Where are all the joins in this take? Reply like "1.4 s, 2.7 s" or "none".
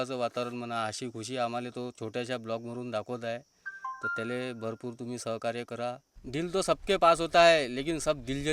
6.1 s